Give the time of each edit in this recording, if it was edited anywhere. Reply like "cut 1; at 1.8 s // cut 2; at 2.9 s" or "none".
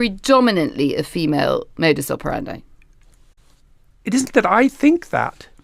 none